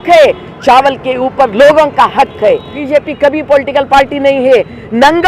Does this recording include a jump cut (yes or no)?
yes